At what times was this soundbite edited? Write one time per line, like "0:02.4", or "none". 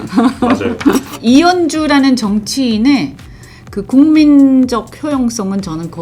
0:01.1